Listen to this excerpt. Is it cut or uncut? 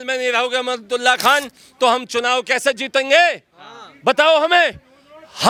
uncut